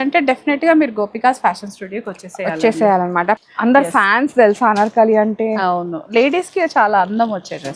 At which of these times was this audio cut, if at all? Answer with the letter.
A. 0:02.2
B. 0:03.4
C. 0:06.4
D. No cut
B